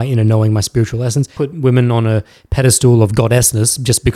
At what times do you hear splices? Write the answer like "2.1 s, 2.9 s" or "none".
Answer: 1.3 s